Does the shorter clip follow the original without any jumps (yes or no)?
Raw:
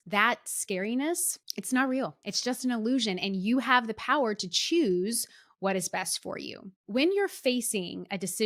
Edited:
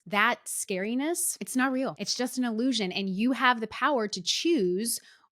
no